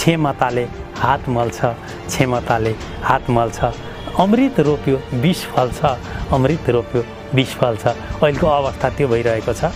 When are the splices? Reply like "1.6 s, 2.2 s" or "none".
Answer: none

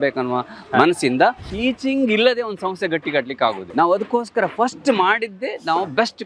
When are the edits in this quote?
1.5 s, 3.7 s

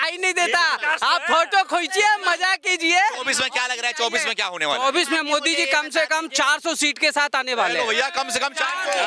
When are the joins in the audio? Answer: none

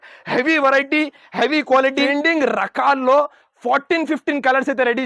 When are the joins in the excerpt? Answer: 2.1 s

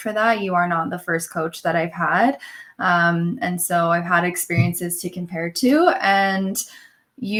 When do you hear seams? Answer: none

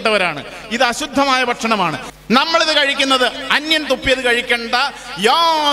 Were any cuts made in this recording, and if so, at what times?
2.0 s

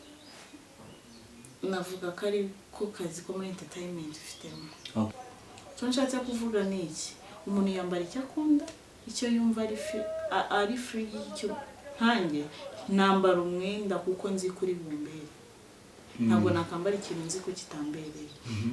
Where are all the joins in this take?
5.1 s

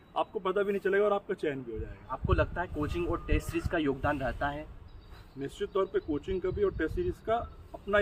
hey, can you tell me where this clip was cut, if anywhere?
none

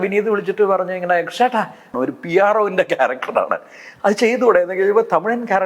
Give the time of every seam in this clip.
1.9 s

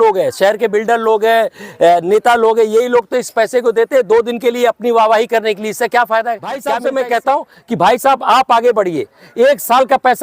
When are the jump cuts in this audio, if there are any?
6.6 s

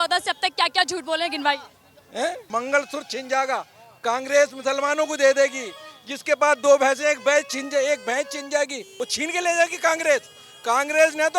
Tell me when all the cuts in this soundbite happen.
2.4 s, 8.8 s

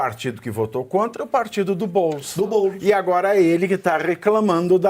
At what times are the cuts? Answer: none

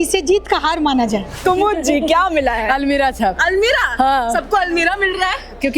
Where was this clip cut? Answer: 1.4 s

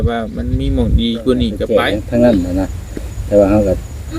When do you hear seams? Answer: 1.6 s

